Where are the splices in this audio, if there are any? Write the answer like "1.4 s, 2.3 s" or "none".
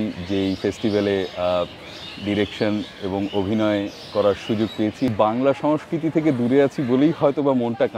5.1 s